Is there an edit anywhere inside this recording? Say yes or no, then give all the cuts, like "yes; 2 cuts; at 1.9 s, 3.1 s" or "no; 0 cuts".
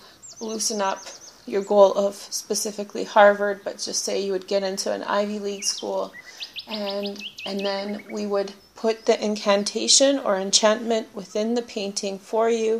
no; 0 cuts